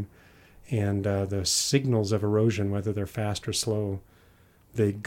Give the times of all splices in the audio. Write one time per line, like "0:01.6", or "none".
none